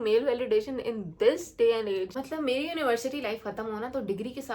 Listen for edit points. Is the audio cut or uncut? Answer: cut